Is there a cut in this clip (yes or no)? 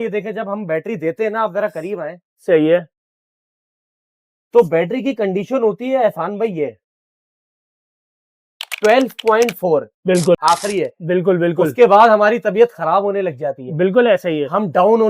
yes